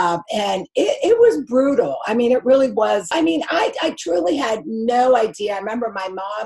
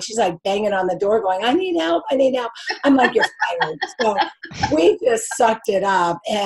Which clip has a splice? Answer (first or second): first